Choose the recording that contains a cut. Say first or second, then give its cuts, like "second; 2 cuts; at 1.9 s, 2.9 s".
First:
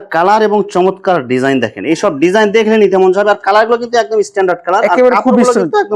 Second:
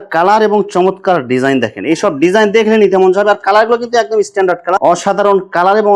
second; 1 cut; at 4.8 s